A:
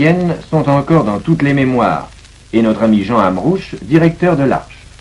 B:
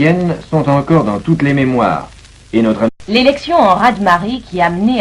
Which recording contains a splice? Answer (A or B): A